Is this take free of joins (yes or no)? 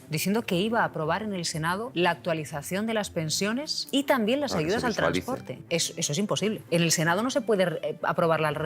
no